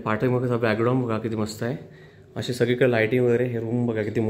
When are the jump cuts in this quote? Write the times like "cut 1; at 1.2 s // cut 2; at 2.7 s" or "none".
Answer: none